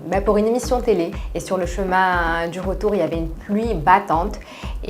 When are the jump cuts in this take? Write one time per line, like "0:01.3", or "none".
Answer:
0:01.2